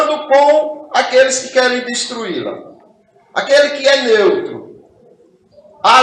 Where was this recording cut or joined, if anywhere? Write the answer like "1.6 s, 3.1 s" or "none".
none